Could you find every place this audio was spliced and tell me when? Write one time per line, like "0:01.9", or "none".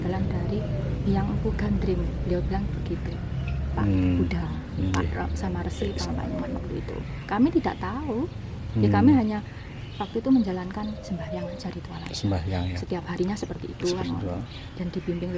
none